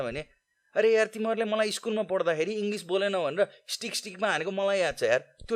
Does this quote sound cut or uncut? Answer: uncut